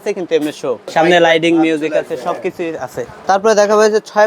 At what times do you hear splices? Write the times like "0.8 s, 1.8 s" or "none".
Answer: 0.9 s, 3.1 s